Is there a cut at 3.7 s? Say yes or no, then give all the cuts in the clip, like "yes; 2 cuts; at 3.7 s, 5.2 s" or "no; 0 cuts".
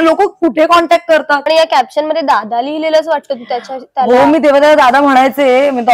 no; 1 cut; at 1.4 s